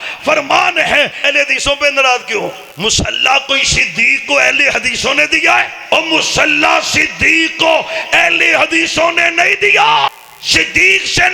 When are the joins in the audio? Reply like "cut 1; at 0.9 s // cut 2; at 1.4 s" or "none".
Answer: cut 1; at 1.3 s // cut 2; at 2.6 s // cut 3; at 5.8 s // cut 4; at 10.1 s